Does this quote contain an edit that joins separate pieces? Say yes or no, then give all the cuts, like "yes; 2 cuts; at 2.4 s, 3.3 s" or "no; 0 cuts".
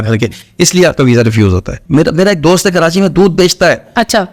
yes; 1 cut; at 1.7 s